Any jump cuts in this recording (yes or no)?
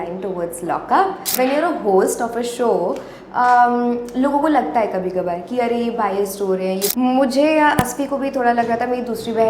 yes